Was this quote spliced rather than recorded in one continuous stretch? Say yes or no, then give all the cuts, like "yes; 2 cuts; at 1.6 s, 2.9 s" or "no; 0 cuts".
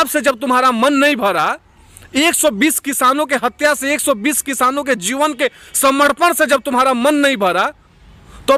no; 0 cuts